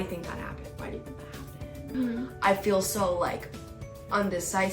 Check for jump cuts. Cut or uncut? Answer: cut